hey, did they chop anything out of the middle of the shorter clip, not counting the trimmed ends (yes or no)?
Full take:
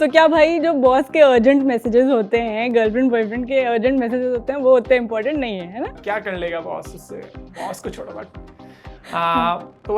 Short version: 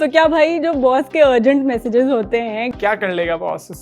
yes